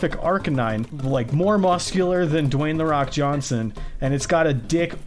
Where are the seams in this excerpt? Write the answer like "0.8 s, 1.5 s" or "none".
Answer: 0.9 s